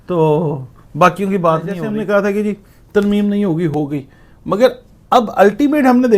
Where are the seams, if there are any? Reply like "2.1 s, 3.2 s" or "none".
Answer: 1.8 s